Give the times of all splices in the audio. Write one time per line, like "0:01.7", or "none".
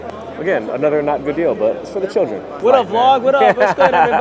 0:02.6

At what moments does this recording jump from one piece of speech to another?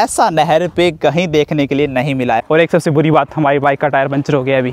0:02.4

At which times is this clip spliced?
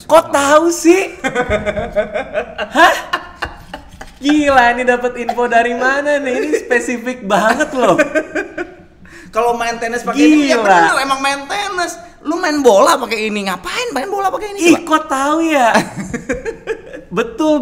none

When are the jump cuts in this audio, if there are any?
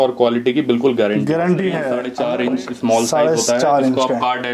0:02.1

